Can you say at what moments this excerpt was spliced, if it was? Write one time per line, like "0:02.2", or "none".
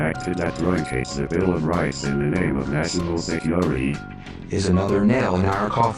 0:02.0